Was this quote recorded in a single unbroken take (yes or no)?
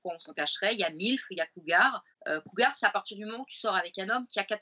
no